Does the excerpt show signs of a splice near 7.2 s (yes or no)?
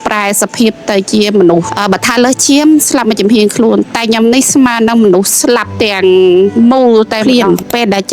yes